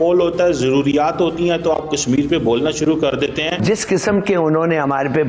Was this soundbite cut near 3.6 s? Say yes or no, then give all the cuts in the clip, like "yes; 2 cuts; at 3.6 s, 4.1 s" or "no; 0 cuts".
yes; 1 cut; at 3.6 s